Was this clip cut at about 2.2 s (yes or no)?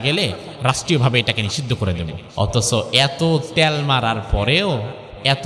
yes